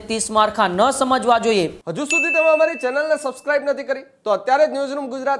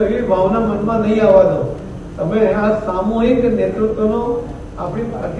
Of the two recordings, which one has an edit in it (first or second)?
first